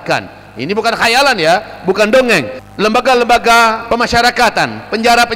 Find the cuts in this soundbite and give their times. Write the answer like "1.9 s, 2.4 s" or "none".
2.6 s, 3.8 s